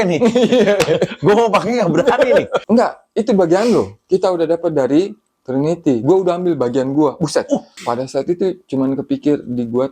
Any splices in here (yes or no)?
yes